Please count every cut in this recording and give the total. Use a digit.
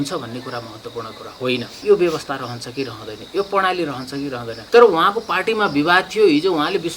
2